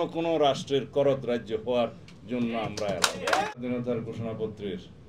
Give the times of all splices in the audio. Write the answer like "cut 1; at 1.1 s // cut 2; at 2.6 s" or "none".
cut 1; at 3.5 s